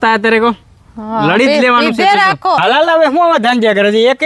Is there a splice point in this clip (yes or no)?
yes